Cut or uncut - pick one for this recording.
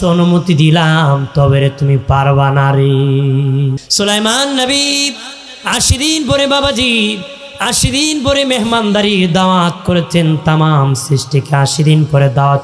cut